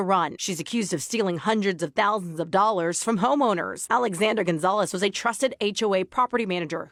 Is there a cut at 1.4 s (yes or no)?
no